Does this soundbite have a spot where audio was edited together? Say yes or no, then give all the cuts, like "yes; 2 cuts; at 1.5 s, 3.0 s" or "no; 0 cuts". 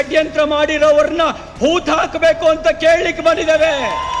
no; 0 cuts